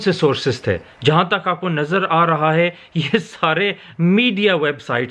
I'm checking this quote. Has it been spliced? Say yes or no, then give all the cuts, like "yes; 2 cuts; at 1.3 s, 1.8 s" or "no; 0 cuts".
no; 0 cuts